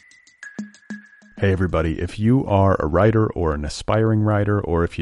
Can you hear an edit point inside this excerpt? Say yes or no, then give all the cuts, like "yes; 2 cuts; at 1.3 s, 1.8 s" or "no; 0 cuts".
yes; 1 cut; at 0.9 s